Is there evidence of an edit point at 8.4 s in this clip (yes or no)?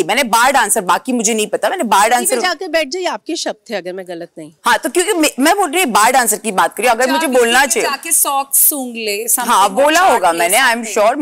no